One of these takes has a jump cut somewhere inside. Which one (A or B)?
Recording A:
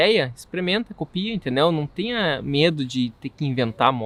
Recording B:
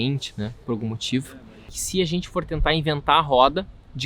B